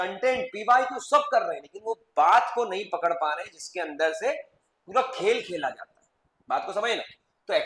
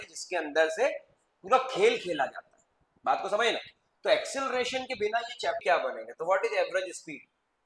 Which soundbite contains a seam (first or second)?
second